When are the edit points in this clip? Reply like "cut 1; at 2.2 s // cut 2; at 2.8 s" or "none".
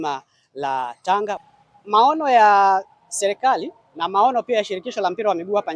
cut 1; at 1.4 s